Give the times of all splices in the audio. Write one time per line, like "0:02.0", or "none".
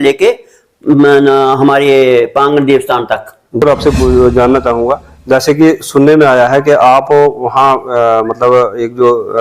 0:03.6